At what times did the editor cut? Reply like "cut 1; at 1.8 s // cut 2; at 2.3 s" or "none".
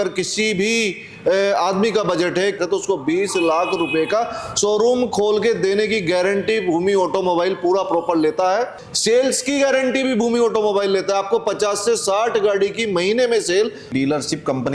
cut 1; at 2.6 s // cut 2; at 8.8 s // cut 3; at 13.9 s